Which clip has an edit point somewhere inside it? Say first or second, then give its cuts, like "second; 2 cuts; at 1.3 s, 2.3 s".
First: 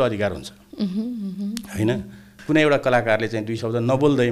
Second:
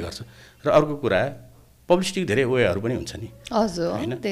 first; 1 cut; at 2.3 s